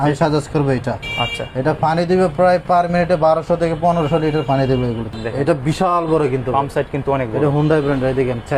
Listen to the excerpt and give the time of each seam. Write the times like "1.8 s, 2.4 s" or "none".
5.1 s